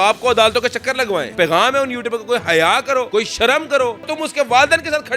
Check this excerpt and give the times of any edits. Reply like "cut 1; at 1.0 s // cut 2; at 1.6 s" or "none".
cut 1; at 1.3 s // cut 2; at 3.1 s // cut 3; at 4.1 s

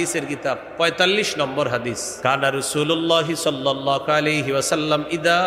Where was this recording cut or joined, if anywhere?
cut 1; at 2.1 s

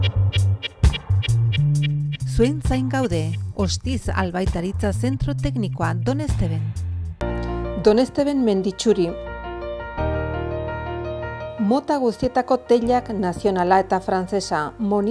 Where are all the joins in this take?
cut 1; at 7.2 s

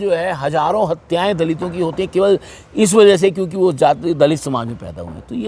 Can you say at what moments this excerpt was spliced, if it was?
none

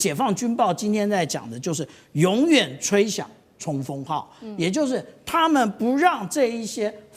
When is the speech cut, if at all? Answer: none

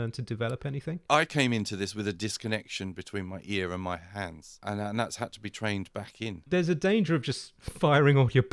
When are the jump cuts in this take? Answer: cut 1; at 0.9 s // cut 2; at 6.5 s

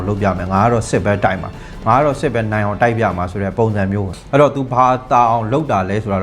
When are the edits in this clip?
cut 1; at 4.1 s

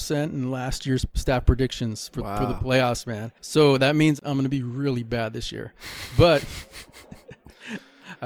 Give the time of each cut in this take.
none

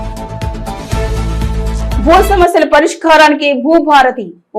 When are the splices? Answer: none

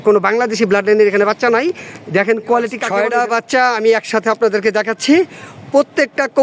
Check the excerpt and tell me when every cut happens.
cut 1; at 2.8 s

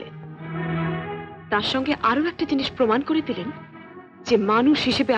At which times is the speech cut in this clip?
none

